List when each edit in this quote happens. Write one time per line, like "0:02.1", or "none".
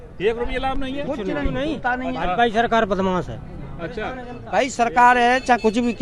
0:01.5
0:04.3